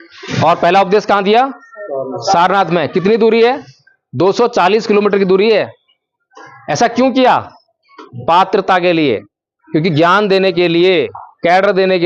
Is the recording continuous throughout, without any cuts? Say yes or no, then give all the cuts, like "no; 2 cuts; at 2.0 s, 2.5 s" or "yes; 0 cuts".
yes; 0 cuts